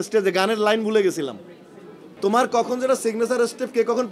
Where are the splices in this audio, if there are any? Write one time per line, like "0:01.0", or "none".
0:02.1